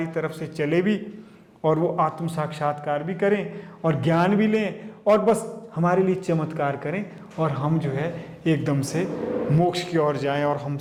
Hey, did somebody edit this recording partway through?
no; 0 cuts

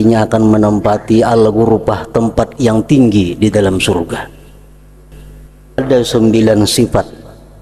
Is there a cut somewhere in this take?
yes; 1 cut; at 5.8 s

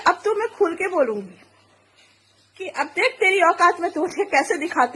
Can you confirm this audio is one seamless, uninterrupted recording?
yes; 0 cuts

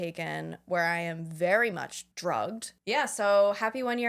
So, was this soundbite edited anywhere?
yes; 2 cuts; at 2.0 s, 2.8 s

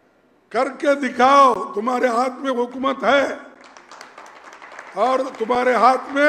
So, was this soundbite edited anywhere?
no; 0 cuts

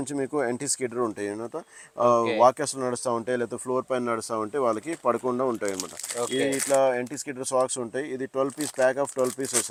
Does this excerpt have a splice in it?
no; 0 cuts

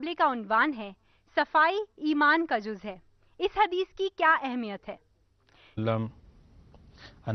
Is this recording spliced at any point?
no; 0 cuts

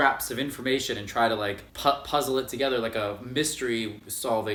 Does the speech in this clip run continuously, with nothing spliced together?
yes; 0 cuts

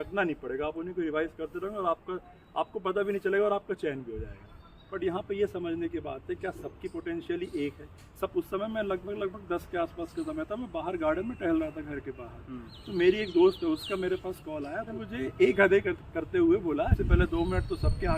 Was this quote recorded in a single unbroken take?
no; 4 cuts; at 4.5 s, 8.3 s, 15.0 s, 17.0 s

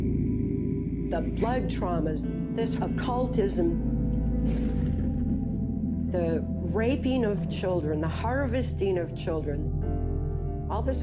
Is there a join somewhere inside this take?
no; 0 cuts

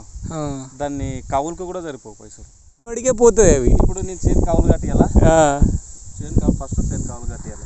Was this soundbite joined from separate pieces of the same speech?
yes; 1 cut; at 3.0 s

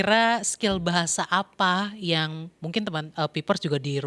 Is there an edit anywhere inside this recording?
no; 0 cuts

